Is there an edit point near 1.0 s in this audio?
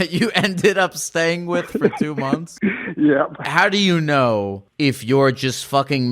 no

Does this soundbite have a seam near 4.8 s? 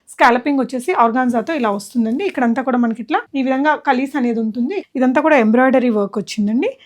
yes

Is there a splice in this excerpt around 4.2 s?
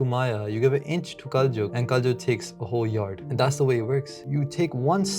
yes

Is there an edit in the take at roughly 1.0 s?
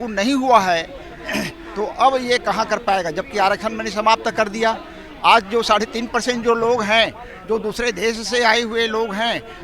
no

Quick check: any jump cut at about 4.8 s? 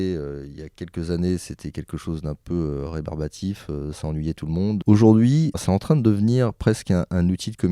yes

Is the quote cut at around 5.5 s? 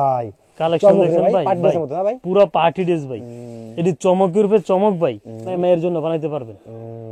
yes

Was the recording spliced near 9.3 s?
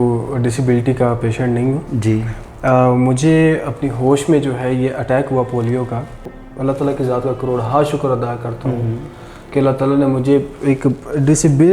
no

